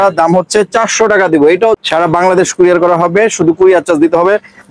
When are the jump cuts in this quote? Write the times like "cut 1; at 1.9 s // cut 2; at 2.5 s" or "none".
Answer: cut 1; at 1.8 s